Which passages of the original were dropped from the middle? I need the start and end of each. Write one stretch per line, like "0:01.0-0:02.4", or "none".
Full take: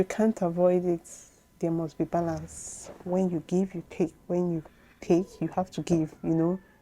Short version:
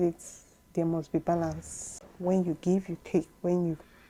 none

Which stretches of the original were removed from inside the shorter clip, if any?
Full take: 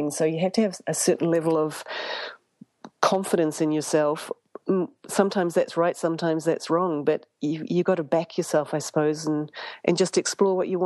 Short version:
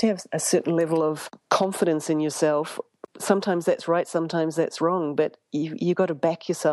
0:01.9-0:02.8
0:04.6-0:04.9

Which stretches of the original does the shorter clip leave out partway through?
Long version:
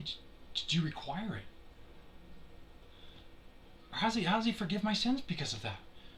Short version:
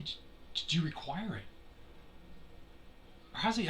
0:02.7-0:03.3

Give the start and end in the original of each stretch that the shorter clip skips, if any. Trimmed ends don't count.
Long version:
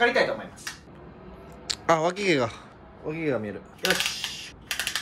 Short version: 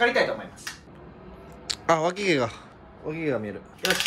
none

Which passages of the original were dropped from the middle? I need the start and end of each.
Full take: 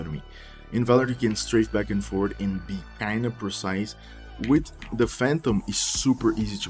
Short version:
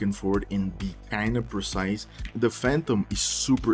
0:04.1-0:04.8

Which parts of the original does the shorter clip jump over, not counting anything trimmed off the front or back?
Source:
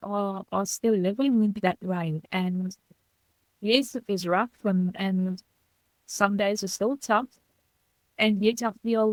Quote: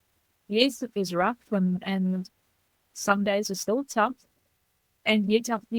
none

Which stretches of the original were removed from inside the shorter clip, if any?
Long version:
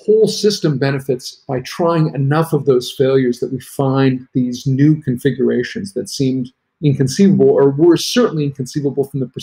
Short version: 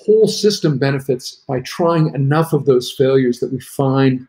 none

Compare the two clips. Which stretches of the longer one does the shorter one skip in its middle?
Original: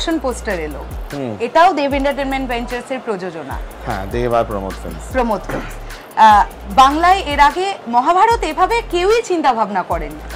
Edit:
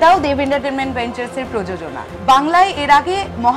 0:03.6-0:06.6

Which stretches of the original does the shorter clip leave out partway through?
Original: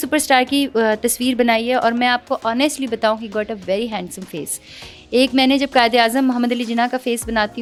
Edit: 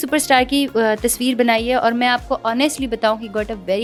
none

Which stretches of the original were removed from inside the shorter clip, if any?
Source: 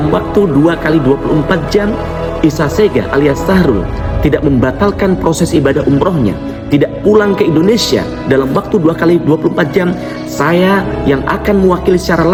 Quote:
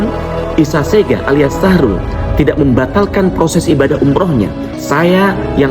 0:06.5-0:10.2

